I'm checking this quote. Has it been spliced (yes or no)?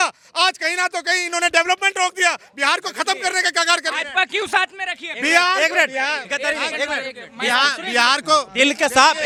no